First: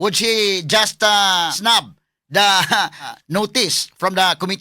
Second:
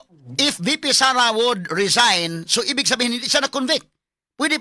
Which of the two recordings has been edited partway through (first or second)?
first